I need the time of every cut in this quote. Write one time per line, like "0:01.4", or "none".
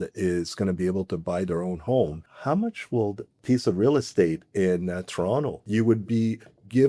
0:02.3
0:05.6